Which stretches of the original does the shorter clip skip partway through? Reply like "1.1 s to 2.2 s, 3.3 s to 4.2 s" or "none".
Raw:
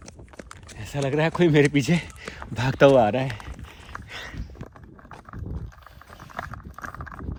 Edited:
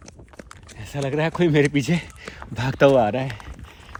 none